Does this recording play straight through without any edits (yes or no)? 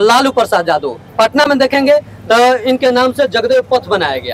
yes